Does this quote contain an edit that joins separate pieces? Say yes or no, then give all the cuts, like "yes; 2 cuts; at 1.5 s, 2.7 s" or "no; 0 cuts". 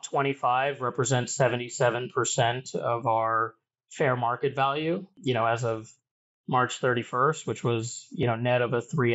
yes; 1 cut; at 5.1 s